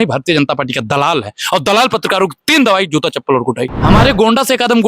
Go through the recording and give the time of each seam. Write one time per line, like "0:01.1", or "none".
0:03.7